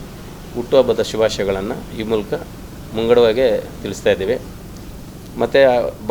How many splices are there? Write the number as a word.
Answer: zero